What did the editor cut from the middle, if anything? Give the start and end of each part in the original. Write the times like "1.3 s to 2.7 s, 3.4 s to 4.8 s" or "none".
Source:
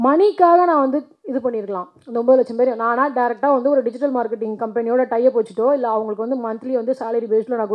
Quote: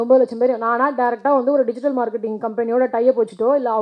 none